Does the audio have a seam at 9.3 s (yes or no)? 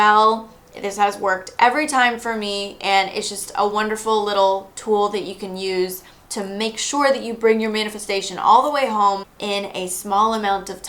yes